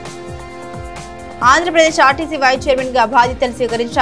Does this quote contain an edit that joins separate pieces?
yes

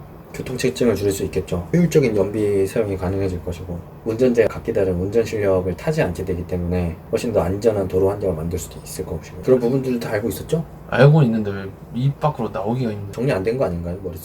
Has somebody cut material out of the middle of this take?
yes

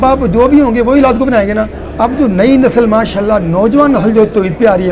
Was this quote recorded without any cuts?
yes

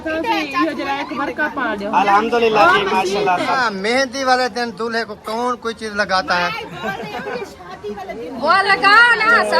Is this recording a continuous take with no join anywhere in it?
no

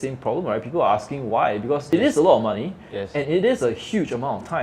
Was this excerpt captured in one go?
no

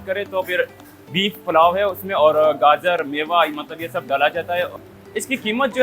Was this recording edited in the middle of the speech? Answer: yes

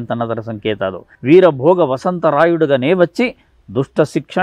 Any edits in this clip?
yes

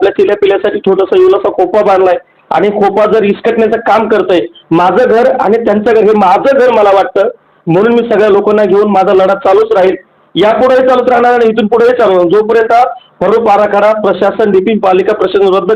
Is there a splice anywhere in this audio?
no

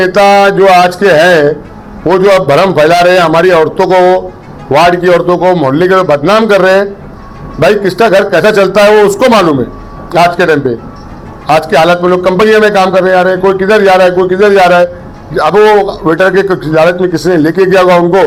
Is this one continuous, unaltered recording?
yes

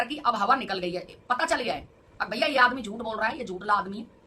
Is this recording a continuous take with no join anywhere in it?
yes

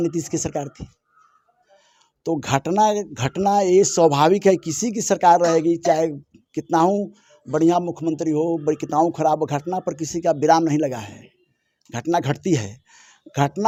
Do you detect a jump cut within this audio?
no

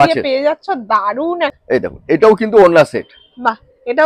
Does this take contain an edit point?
yes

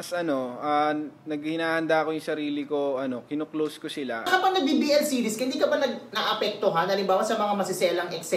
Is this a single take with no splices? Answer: no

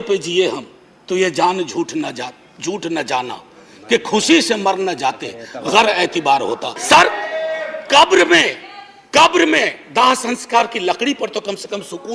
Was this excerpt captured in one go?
no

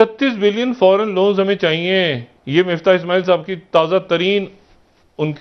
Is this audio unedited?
yes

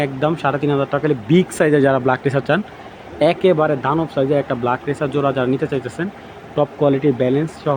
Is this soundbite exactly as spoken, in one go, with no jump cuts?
yes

